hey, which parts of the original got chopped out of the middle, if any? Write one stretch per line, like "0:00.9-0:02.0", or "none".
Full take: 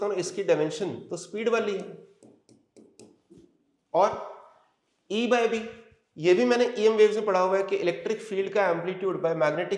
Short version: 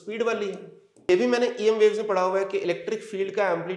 0:02.3-0:06.2